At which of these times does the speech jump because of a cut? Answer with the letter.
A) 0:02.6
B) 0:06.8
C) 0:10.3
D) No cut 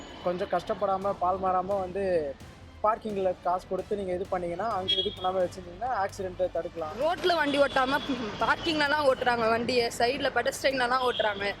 B